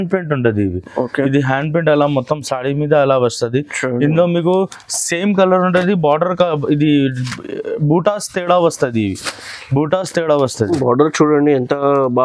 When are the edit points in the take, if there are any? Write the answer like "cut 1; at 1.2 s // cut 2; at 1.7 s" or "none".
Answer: none

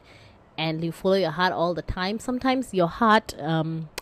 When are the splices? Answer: none

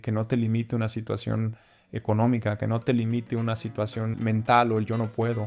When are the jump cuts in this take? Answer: cut 1; at 4.1 s

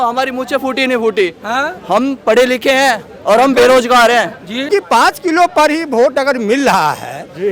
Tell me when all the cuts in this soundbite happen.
cut 1; at 4.7 s

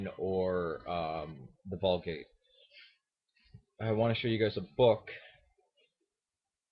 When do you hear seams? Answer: cut 1; at 1.8 s

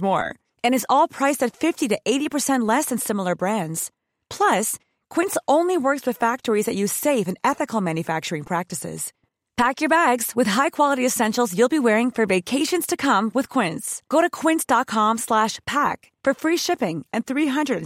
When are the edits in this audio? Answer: none

